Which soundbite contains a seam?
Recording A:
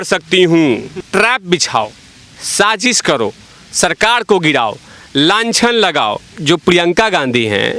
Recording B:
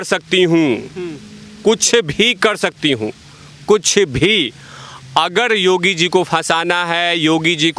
A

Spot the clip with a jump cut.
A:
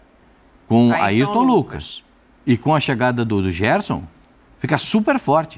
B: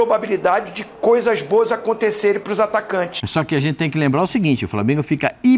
B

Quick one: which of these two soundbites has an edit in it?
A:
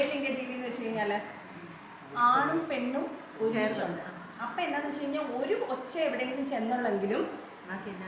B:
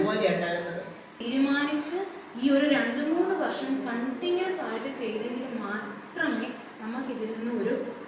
B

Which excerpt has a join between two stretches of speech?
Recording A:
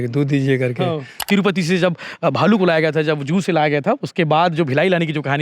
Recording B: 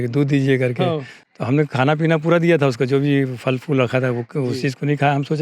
A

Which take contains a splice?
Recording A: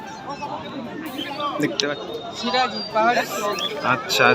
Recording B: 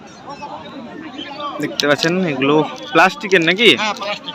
A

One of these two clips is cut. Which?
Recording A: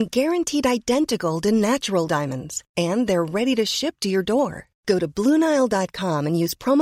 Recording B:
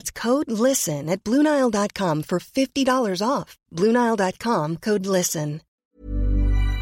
B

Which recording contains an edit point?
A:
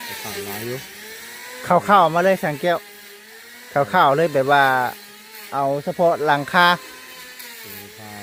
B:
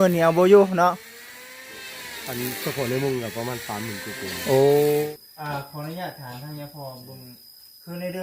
B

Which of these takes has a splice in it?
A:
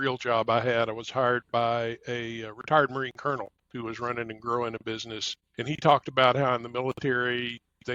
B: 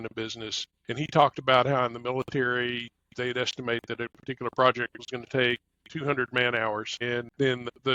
B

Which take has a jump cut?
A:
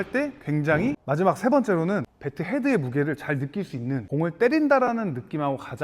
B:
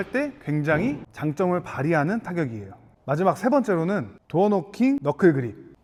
A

